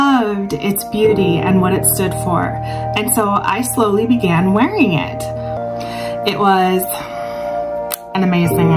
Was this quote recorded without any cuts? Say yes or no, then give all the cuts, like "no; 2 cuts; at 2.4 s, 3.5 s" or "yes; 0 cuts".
no; 1 cut; at 5.6 s